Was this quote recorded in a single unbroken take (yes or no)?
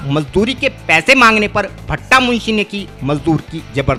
yes